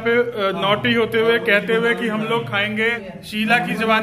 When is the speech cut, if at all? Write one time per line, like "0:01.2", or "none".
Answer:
0:03.1

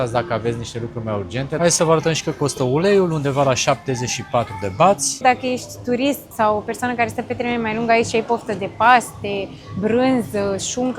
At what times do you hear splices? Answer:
0:01.5
0:05.2
0:06.3

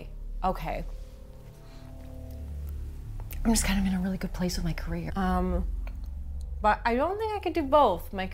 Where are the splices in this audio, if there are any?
0:05.0

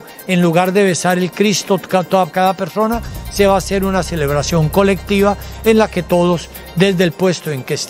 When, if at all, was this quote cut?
none

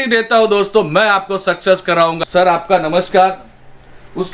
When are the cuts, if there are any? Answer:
none

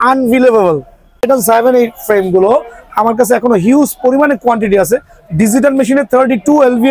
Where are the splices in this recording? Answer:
0:01.2

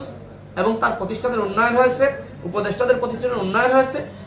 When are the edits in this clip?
none

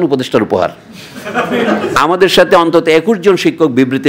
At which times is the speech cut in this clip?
0:01.9

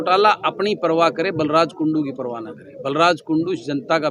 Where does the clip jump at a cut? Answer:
none

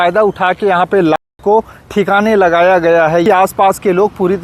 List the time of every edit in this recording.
0:03.2

